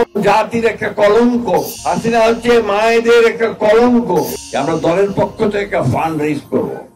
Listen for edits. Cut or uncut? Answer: cut